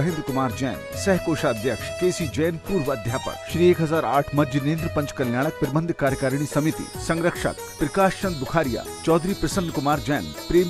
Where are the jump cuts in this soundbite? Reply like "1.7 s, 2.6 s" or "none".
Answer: 1.9 s, 3.4 s